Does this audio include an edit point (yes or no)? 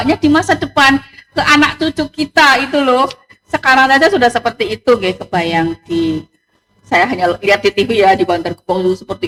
no